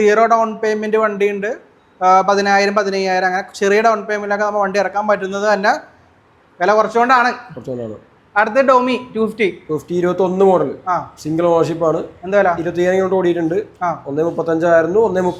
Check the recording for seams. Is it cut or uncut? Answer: uncut